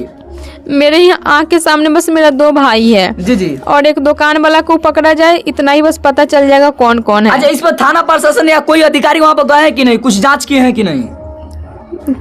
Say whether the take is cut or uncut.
uncut